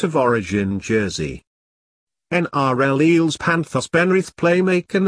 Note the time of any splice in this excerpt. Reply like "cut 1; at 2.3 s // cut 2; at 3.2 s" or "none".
cut 1; at 1.1 s